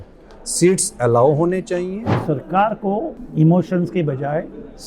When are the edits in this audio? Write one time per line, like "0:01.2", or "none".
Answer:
0:02.2
0:03.2